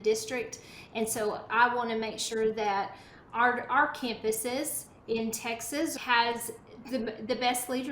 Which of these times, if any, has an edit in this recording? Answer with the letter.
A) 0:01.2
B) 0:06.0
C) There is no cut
B